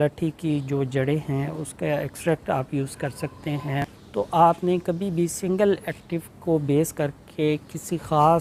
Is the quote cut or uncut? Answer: uncut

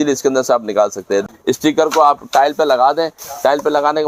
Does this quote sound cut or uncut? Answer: cut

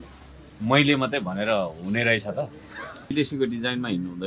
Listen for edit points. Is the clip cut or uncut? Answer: cut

